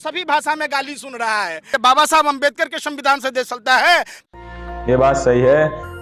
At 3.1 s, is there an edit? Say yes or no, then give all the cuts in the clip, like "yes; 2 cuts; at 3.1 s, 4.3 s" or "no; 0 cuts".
no; 2 cuts; at 1.6 s, 4.3 s